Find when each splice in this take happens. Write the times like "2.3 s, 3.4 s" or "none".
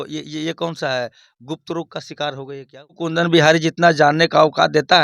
3.0 s